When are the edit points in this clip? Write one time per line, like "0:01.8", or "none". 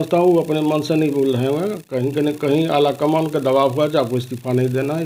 none